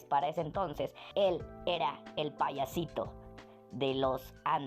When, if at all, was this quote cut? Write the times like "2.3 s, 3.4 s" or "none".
1.0 s

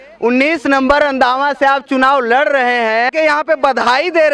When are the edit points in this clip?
3.1 s

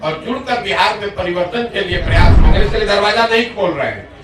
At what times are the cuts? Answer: 2.4 s

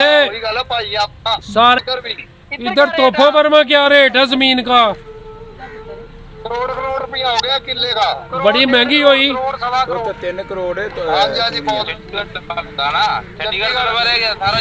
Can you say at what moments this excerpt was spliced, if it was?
1.8 s

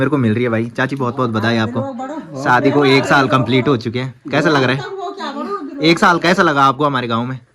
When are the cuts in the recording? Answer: none

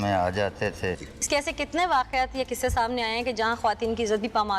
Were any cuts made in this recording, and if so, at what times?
1.0 s

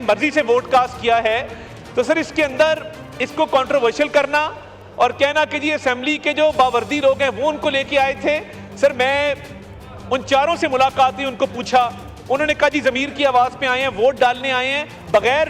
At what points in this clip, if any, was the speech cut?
none

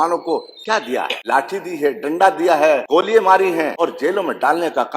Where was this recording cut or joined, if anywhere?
1.2 s, 2.8 s, 3.7 s

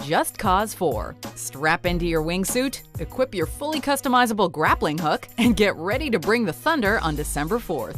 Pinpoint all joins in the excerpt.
none

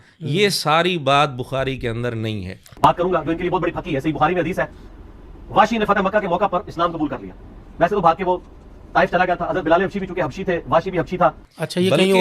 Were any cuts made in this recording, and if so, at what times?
none

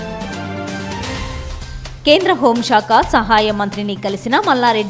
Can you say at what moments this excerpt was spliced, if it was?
1.1 s

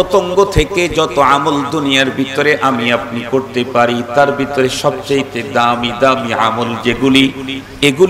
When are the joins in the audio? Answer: none

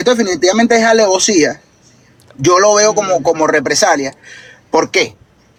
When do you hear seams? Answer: none

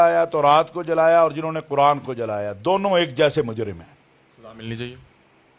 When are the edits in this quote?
none

